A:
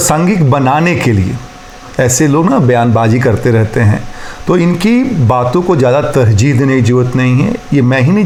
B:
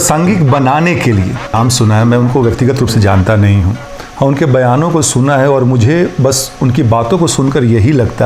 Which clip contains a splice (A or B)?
B